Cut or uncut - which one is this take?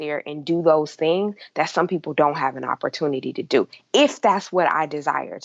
uncut